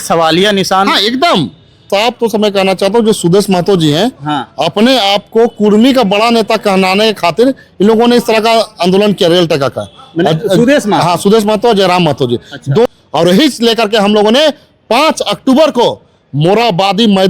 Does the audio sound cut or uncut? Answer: cut